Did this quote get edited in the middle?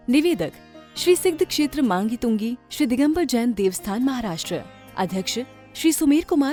no; 0 cuts

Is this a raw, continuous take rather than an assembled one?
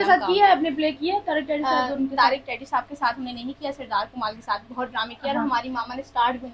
yes; 0 cuts

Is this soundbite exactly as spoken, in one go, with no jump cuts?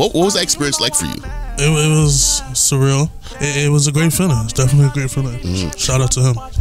no; 1 cut; at 3.2 s

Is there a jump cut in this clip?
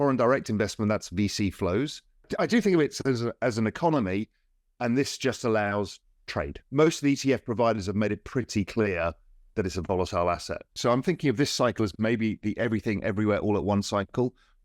yes; 3 cuts; at 2.3 s, 6.5 s, 10.6 s

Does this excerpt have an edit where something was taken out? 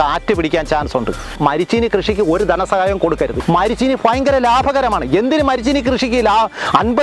yes; 2 cuts; at 1.3 s, 3.4 s

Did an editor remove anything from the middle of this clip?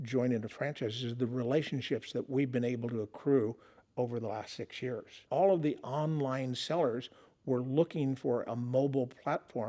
yes; 1 cut; at 5.2 s

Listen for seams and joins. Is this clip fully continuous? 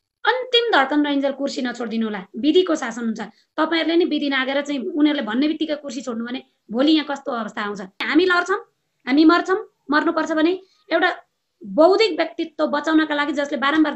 no; 1 cut; at 8.0 s

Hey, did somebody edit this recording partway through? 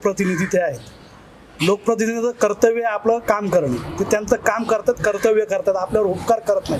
no; 0 cuts

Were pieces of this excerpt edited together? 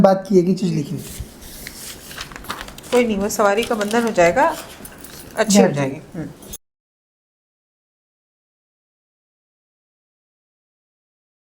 no; 0 cuts

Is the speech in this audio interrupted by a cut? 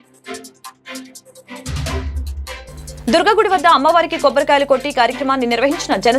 yes; 1 cut; at 2.3 s

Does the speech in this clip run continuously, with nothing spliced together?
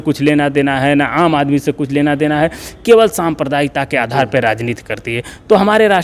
yes; 0 cuts

